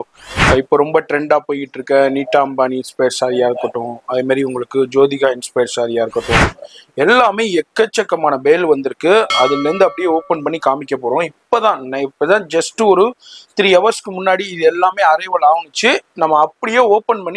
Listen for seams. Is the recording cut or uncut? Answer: uncut